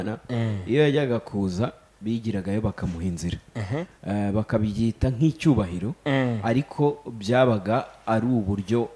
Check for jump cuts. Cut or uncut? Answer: uncut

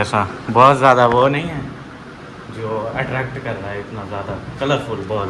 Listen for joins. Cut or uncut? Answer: uncut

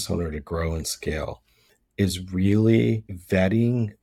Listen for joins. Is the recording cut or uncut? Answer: cut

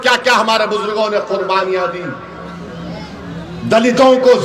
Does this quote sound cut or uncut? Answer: uncut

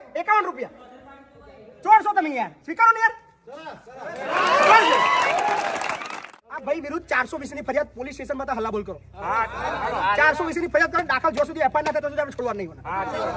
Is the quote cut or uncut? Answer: cut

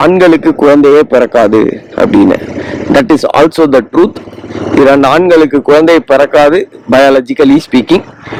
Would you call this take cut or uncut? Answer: uncut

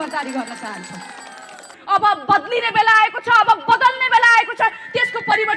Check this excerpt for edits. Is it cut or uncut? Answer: cut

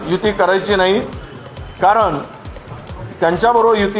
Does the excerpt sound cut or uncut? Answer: uncut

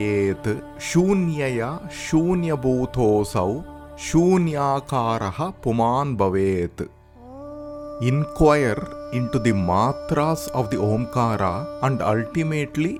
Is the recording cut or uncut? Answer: uncut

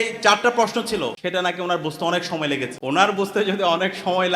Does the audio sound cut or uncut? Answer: cut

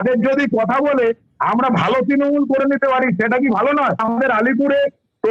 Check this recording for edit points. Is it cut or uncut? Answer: cut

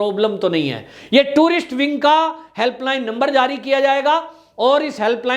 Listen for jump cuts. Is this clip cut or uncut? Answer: uncut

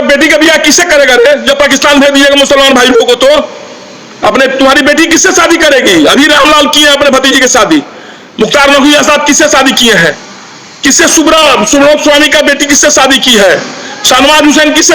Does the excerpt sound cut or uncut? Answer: uncut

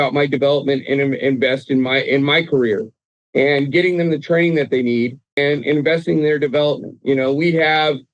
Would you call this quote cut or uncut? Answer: cut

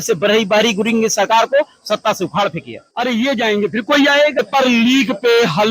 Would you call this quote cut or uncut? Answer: cut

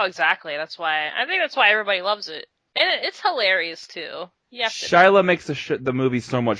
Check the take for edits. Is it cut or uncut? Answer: cut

